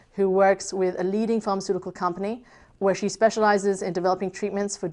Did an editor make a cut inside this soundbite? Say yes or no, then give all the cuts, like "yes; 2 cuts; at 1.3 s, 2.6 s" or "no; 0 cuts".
no; 0 cuts